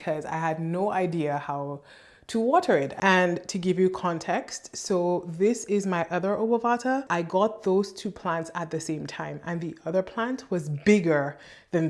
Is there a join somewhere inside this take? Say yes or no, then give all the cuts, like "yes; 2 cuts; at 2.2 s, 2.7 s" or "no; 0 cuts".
yes; 2 cuts; at 2.9 s, 7.1 s